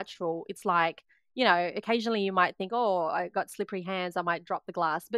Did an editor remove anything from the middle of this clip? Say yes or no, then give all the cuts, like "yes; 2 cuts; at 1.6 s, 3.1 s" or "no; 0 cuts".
no; 0 cuts